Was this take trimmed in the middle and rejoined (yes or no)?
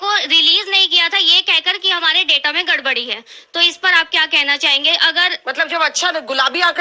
no